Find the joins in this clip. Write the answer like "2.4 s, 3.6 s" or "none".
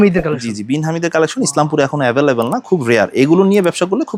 none